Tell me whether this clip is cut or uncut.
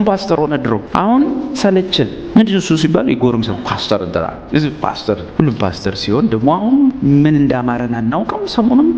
cut